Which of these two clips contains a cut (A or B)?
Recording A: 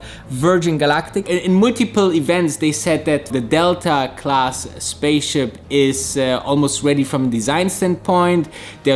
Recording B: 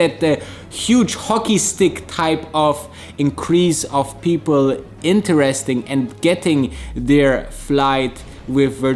A